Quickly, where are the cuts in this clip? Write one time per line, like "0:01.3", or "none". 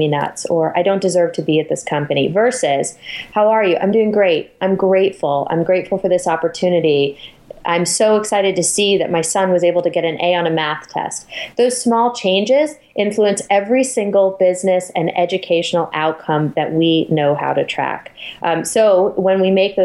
none